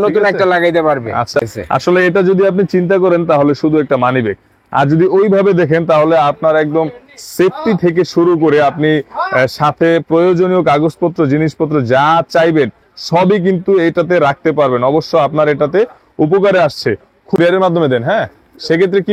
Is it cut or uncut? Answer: cut